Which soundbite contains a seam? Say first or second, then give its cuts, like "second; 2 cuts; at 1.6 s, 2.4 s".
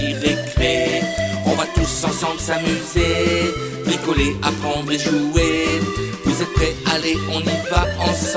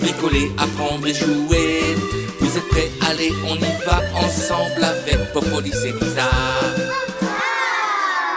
second; 1 cut; at 7.4 s